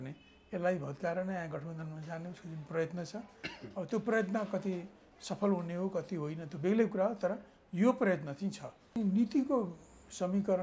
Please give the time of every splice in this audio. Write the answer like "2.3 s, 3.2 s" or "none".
9.0 s